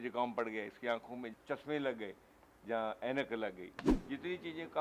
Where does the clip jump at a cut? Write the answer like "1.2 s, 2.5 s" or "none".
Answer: 1.3 s, 3.9 s